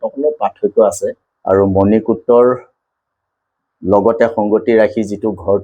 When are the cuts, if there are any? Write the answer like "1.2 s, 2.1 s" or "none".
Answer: 1.3 s